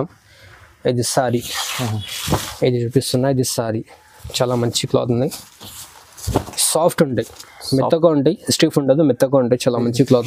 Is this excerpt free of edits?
yes; 0 cuts

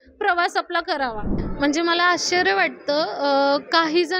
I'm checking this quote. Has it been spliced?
yes; 1 cut; at 1.3 s

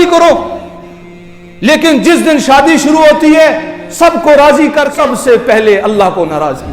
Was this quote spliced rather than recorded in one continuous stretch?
yes; 1 cut; at 4.9 s

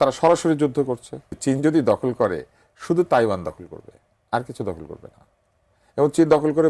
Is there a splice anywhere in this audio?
yes; 1 cut; at 1.4 s

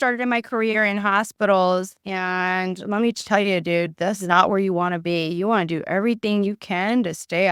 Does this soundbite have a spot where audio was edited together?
no; 0 cuts

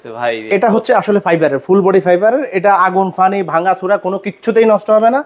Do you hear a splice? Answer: no; 0 cuts

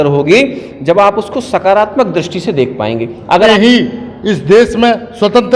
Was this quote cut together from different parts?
yes; 1 cut; at 3.5 s

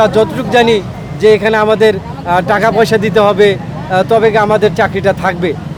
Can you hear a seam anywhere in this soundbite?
no; 0 cuts

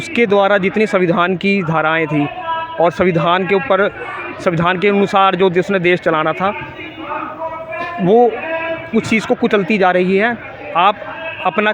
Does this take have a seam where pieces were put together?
no; 0 cuts

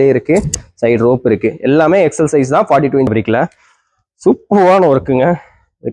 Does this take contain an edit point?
yes; 1 cut; at 3.1 s

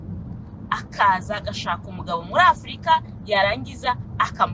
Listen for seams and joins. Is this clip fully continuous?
yes; 0 cuts

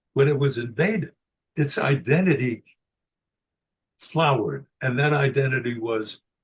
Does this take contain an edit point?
no; 0 cuts

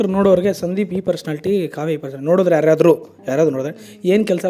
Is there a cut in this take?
no; 0 cuts

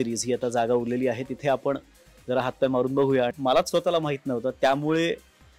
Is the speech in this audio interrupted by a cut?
yes; 1 cut; at 3.4 s

